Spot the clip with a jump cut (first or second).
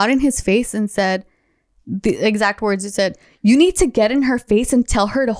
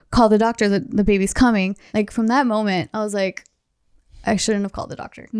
second